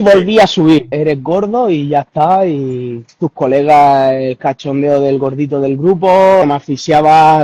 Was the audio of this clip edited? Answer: yes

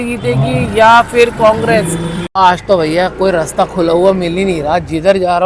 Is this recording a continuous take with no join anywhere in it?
no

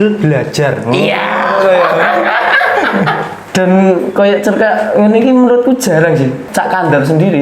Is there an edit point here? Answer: yes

